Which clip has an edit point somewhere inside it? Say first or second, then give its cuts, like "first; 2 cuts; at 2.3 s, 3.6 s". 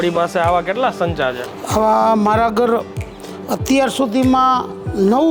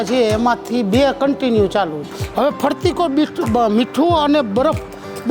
second; 1 cut; at 2.2 s